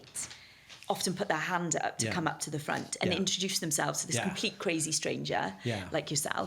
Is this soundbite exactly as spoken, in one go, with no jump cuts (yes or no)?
yes